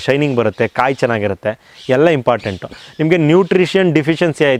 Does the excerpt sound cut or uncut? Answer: uncut